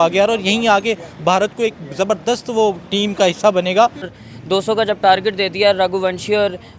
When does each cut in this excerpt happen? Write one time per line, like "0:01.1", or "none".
0:04.1